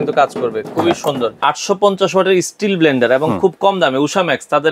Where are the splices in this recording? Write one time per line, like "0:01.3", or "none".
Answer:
0:01.4

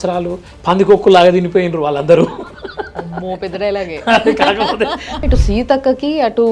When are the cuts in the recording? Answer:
0:05.2

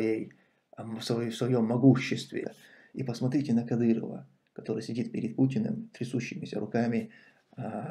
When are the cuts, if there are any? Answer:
0:02.5

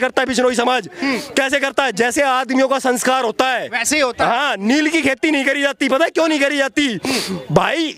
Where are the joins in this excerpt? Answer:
none

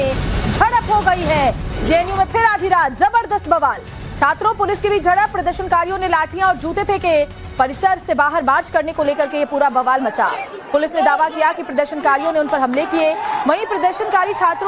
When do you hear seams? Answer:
0:13.3

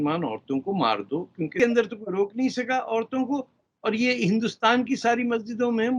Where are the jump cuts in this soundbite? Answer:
0:01.6

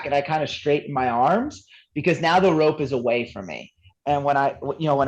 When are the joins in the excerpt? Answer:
0:03.9

